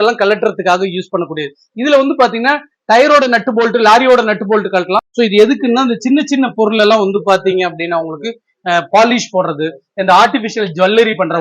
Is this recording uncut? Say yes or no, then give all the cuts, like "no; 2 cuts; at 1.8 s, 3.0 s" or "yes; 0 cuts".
no; 1 cut; at 5.1 s